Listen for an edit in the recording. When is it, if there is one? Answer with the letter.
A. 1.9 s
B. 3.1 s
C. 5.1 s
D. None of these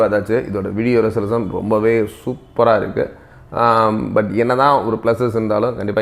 D